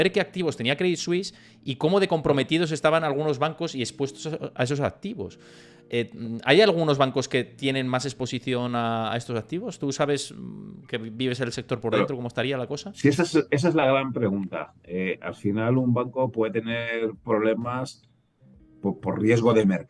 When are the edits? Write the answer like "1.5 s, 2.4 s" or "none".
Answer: none